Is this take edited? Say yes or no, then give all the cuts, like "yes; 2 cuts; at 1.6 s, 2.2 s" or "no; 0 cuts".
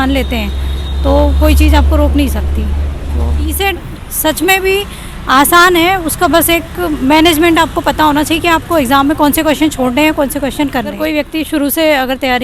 yes; 2 cuts; at 3.5 s, 11.0 s